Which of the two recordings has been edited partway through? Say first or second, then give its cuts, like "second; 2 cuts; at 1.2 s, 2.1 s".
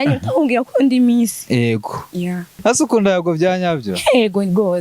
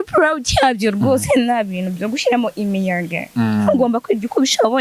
first; 1 cut; at 2.6 s